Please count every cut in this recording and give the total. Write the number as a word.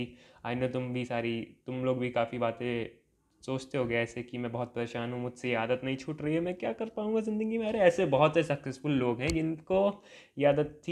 zero